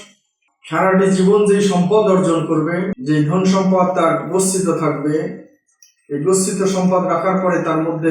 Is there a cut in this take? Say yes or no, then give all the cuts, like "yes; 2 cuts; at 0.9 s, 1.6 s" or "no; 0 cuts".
yes; 1 cut; at 3.0 s